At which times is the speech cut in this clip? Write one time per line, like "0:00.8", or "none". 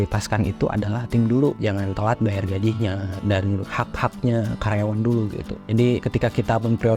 0:01.6
0:03.5
0:05.7